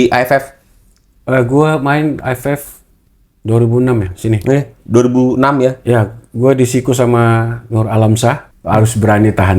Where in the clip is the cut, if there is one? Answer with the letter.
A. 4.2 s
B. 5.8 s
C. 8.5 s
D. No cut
C